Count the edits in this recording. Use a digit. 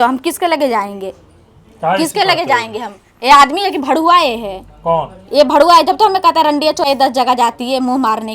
1